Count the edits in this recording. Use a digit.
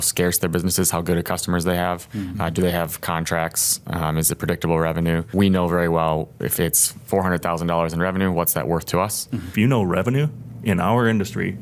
2